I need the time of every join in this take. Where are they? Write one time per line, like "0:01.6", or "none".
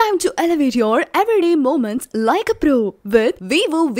none